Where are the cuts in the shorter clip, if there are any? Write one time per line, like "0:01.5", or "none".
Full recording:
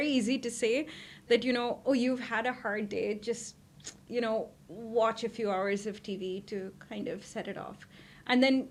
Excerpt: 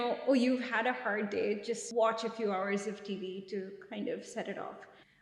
0:01.8